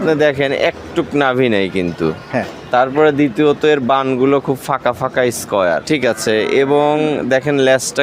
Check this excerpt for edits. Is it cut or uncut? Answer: cut